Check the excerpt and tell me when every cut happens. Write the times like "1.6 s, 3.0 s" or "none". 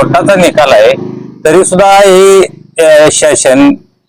none